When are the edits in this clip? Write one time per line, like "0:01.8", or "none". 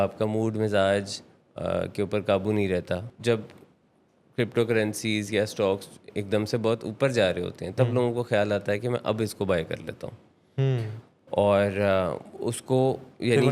0:03.1